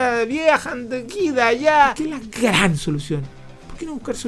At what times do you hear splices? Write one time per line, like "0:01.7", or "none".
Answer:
0:02.0